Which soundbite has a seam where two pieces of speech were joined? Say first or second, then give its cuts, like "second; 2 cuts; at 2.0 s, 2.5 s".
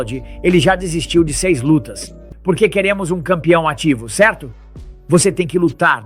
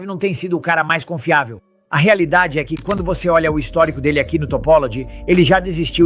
first; 1 cut; at 2.3 s